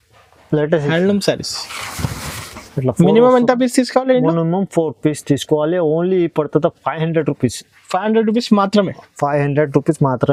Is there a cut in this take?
no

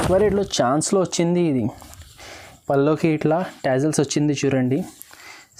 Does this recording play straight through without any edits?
yes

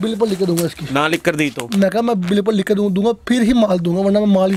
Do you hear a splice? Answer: no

